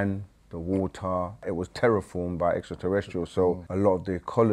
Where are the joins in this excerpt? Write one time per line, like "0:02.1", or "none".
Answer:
0:01.5
0:03.7